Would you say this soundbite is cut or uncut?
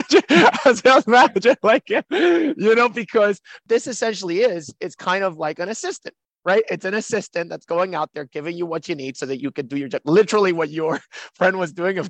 cut